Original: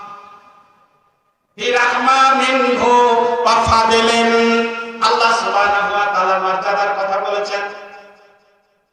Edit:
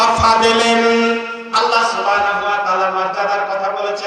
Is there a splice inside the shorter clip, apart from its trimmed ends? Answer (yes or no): no